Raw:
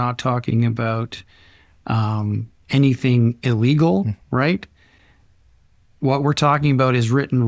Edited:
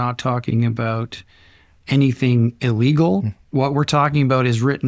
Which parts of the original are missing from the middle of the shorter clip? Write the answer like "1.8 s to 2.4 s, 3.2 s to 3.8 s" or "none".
1.7 s to 2.5 s, 4.2 s to 5.9 s